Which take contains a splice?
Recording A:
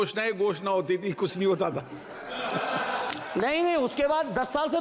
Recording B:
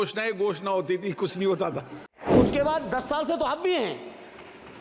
B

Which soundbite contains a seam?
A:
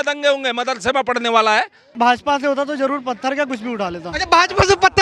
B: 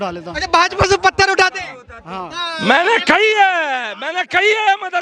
A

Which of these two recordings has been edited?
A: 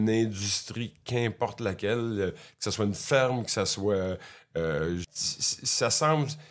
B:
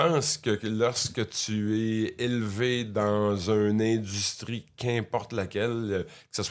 A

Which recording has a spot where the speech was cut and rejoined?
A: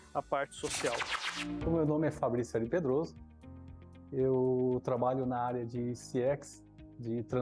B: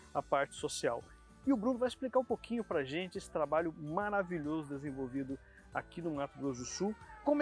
A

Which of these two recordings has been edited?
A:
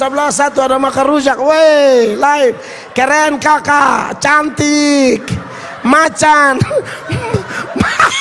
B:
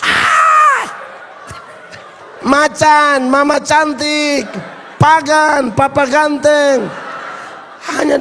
B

